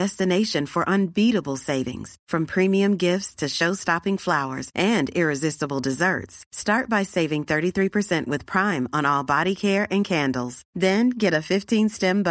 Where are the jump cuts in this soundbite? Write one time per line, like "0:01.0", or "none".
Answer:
none